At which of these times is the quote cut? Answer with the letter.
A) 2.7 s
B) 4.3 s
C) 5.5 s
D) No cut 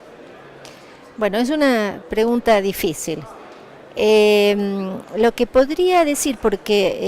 B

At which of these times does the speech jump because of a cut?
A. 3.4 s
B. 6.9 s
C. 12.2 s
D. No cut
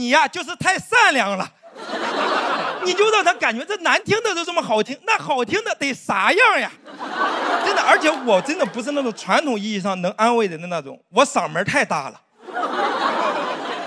D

